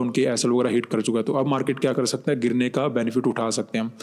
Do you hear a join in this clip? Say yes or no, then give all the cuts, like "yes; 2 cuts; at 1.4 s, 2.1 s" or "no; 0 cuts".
no; 0 cuts